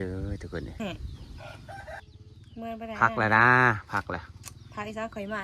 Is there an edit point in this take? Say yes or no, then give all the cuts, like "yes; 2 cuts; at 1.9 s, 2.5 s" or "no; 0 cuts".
yes; 1 cut; at 2.0 s